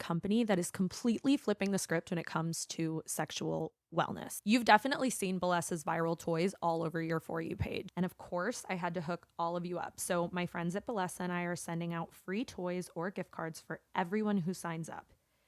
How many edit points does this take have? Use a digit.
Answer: 1